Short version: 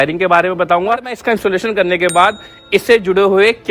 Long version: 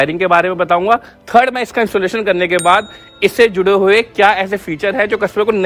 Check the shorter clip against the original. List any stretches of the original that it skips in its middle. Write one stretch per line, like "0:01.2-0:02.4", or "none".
0:01.1-0:01.6